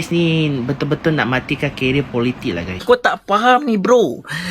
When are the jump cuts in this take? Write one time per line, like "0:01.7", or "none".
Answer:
0:02.7